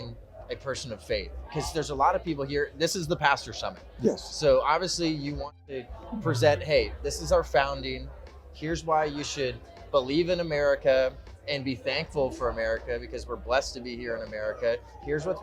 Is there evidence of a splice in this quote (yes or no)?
no